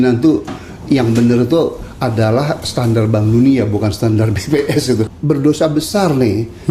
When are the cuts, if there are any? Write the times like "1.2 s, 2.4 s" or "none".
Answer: 5.0 s